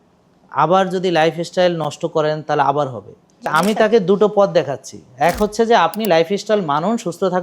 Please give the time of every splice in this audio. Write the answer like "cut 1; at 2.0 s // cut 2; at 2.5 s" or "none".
cut 1; at 3.5 s

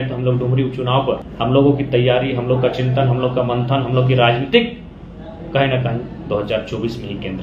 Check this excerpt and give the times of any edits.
cut 1; at 1.3 s

